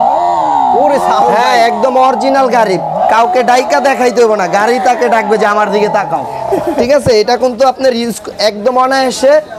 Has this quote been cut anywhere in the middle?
no; 0 cuts

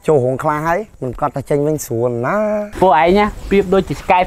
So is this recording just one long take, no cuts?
no; 2 cuts; at 1.0 s, 2.7 s

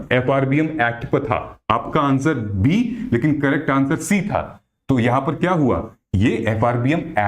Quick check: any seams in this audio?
no; 0 cuts

